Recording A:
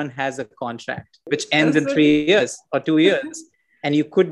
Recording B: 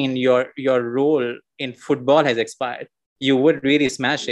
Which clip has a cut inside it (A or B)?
A